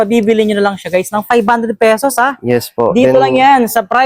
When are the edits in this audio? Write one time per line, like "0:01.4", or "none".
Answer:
none